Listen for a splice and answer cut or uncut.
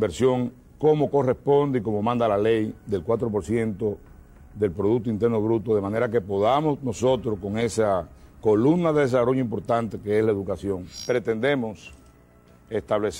cut